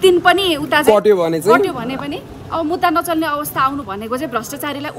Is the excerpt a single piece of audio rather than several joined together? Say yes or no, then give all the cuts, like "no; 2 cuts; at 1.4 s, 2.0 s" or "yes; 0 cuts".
yes; 0 cuts